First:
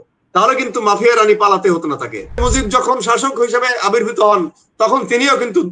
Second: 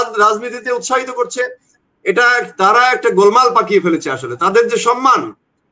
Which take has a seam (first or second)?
first